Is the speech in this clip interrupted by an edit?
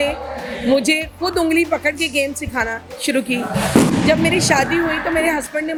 no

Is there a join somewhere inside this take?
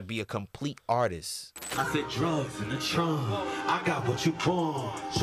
yes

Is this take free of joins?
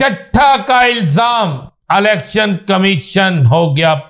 yes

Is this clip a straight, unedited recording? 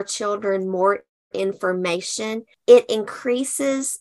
no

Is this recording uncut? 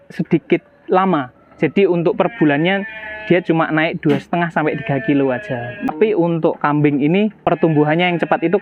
no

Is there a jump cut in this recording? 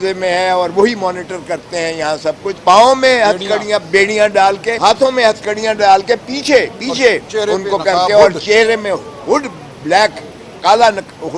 yes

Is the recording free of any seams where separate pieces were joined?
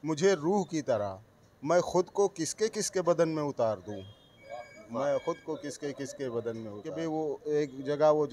no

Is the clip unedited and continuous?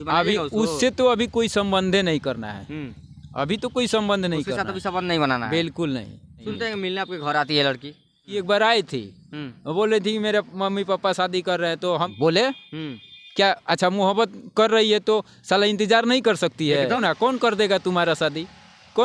no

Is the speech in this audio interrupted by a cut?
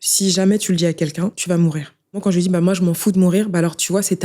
yes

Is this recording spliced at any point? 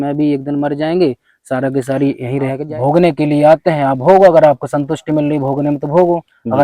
yes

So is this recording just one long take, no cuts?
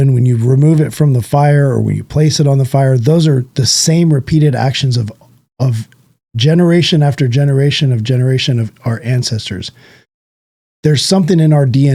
yes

